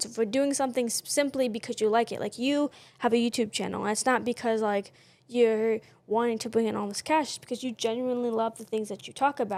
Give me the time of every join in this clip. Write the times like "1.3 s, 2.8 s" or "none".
none